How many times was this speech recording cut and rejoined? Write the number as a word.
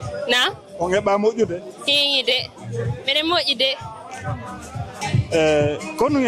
one